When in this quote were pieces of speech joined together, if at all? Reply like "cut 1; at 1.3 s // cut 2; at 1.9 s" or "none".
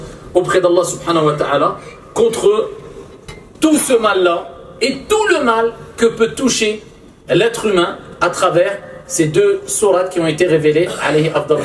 none